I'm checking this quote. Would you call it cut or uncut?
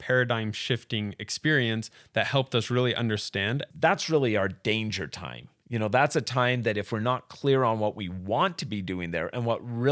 cut